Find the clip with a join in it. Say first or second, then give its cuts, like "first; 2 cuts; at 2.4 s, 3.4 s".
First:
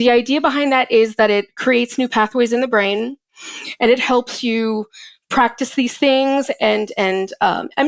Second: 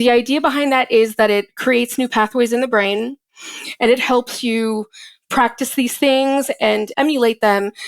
second; 1 cut; at 6.9 s